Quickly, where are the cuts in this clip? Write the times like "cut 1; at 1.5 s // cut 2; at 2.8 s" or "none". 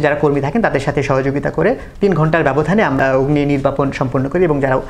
cut 1; at 1.9 s // cut 2; at 3.0 s